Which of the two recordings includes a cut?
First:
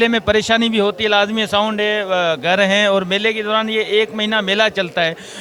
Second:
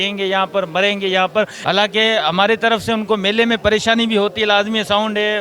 second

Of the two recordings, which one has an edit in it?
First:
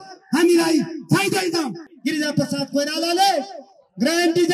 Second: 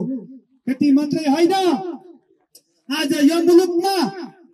first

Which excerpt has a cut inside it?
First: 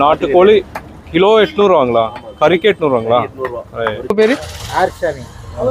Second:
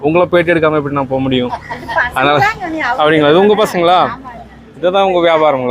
first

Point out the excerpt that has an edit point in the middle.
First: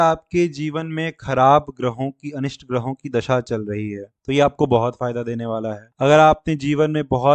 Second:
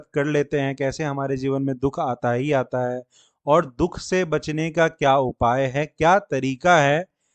first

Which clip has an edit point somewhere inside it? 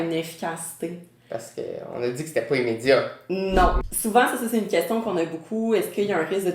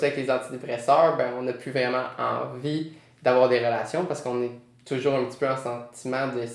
first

